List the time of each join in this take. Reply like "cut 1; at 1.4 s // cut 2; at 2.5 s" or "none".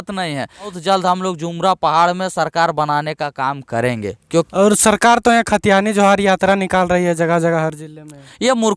cut 1; at 0.8 s // cut 2; at 4.5 s